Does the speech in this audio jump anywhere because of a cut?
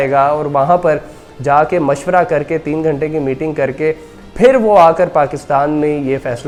no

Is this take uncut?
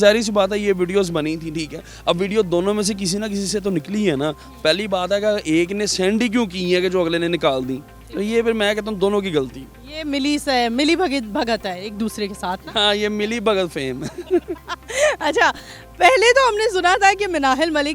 yes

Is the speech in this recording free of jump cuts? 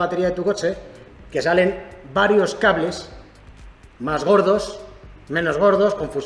yes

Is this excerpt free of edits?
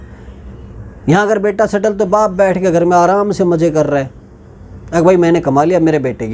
yes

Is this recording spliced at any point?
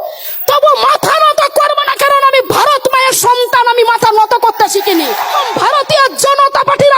yes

